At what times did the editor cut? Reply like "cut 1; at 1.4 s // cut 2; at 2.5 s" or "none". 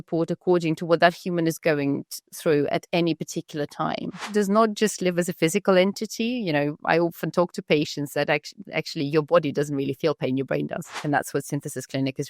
cut 1; at 4.3 s // cut 2; at 11.0 s